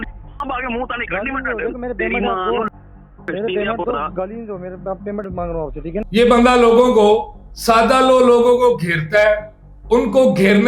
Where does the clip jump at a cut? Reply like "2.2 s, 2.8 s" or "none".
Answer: 5.9 s